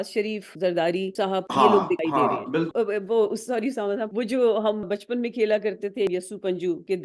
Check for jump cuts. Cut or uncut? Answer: uncut